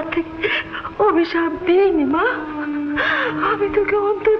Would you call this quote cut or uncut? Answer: uncut